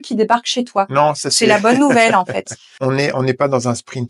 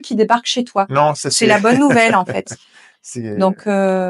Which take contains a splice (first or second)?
first